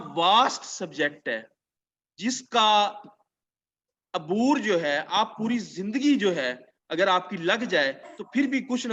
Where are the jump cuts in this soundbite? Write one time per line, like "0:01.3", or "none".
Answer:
none